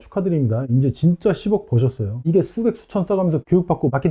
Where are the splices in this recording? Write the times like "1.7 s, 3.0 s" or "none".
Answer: 2.2 s